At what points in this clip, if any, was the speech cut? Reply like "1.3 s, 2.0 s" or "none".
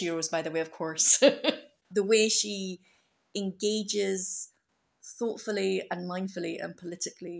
1.7 s